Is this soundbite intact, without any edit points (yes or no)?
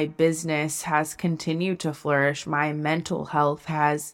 yes